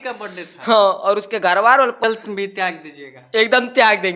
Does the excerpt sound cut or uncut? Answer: cut